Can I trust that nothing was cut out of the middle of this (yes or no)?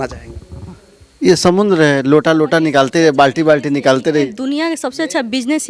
no